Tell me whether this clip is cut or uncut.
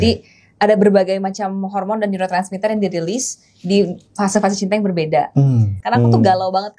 cut